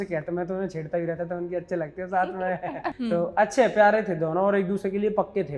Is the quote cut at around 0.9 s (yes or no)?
no